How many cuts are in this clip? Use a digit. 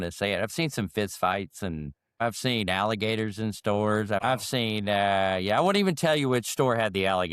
2